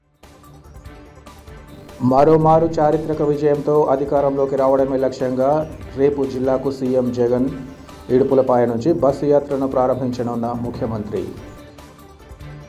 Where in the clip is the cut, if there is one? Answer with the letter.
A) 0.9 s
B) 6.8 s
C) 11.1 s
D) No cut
A